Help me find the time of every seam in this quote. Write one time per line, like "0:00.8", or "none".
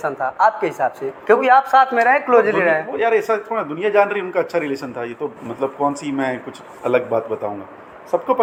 none

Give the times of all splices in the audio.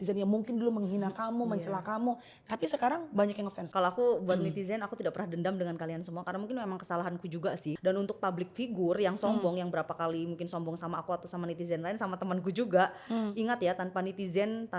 0:03.6
0:07.8

